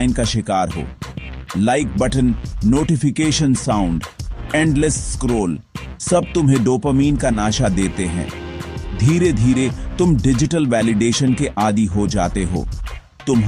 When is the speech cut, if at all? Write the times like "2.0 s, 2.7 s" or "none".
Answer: none